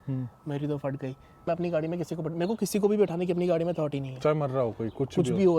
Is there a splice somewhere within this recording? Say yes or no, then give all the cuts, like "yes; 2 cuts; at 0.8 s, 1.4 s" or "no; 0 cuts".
yes; 1 cut; at 1.5 s